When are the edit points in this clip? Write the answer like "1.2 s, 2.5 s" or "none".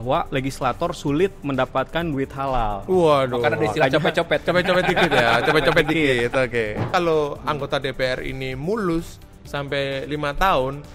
6.9 s